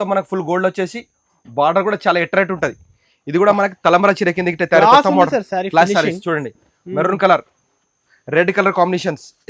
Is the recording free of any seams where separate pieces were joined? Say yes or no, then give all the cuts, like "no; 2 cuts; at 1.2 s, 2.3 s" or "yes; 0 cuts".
yes; 0 cuts